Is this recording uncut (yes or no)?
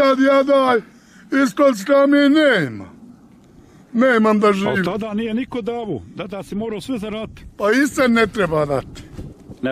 yes